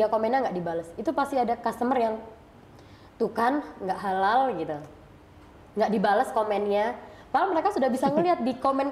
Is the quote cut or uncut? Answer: uncut